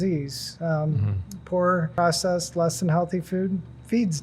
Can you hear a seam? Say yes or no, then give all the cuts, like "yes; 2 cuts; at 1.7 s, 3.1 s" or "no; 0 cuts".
yes; 1 cut; at 1.9 s